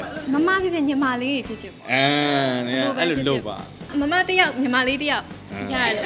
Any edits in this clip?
yes; 1 cut; at 3.9 s

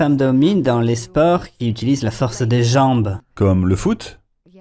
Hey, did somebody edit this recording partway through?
yes; 1 cut; at 3.2 s

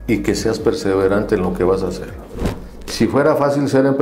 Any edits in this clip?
yes; 1 cut; at 2.7 s

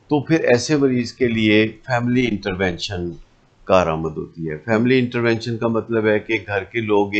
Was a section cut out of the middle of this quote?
no; 0 cuts

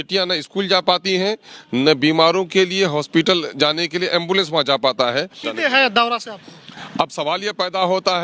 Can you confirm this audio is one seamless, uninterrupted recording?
no; 1 cut; at 5.5 s

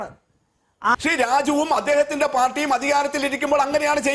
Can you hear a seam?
yes; 1 cut; at 0.9 s

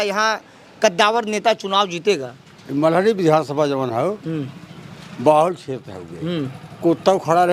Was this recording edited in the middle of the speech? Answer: no; 0 cuts

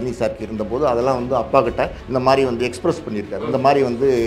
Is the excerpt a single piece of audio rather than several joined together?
no; 1 cut; at 2.0 s

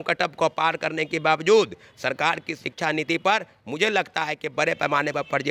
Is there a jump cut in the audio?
no; 0 cuts

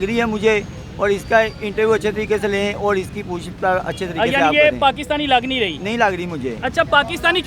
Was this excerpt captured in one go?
yes; 0 cuts

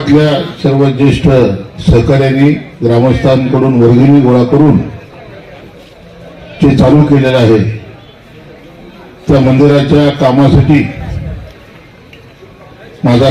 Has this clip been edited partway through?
no; 0 cuts

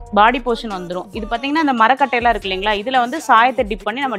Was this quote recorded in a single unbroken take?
yes; 0 cuts

